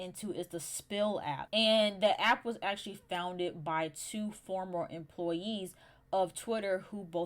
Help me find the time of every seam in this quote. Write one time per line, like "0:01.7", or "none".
0:01.4